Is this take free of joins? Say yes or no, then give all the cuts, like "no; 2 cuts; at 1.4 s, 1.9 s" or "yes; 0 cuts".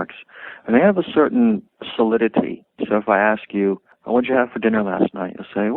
no; 3 cuts; at 1.8 s, 2.7 s, 3.9 s